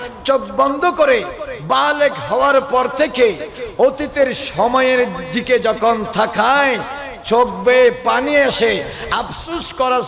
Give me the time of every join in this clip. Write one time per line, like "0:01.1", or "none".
none